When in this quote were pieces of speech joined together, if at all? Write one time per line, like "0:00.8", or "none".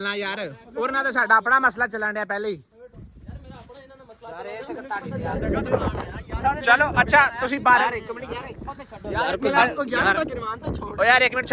0:05.4